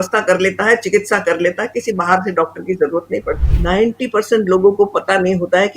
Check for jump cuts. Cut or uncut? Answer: cut